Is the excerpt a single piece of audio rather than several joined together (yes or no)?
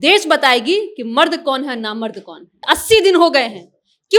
no